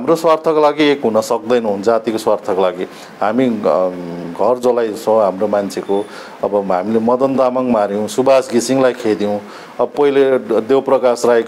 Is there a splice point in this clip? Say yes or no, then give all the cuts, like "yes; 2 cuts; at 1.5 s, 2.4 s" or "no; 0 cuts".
no; 0 cuts